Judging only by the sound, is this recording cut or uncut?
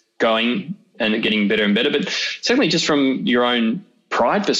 uncut